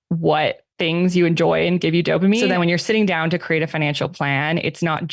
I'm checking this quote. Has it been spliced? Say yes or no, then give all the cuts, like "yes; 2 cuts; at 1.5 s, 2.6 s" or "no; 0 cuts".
yes; 1 cut; at 2.4 s